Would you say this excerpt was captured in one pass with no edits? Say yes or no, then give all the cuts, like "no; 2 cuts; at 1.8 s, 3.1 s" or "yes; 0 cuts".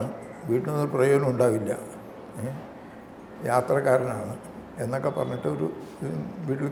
yes; 0 cuts